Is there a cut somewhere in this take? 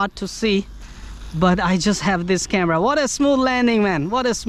no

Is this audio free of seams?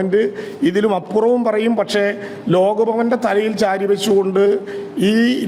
yes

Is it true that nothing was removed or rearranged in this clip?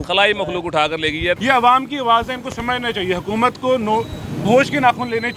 no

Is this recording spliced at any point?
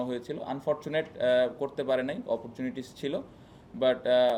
no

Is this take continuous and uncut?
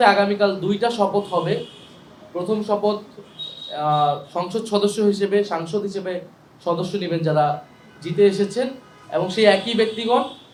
yes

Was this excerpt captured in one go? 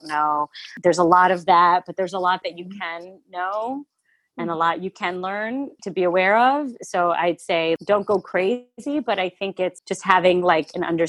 yes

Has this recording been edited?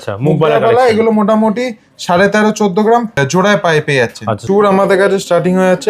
yes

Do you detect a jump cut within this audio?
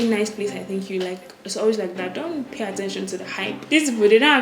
yes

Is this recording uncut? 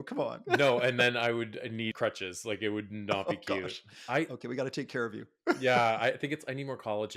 no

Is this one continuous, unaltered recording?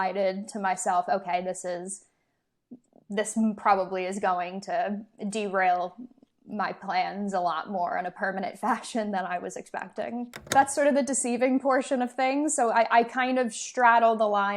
no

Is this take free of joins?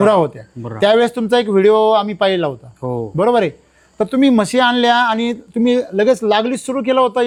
yes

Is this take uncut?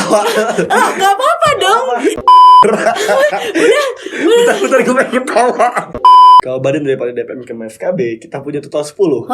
no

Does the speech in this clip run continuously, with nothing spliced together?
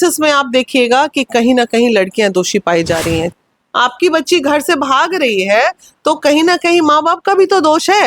no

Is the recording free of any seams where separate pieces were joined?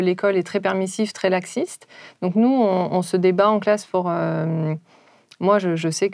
yes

